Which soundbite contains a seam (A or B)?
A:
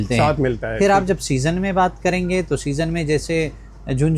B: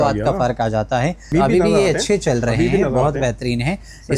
B